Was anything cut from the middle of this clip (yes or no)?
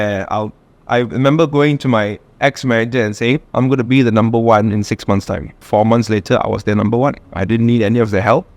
yes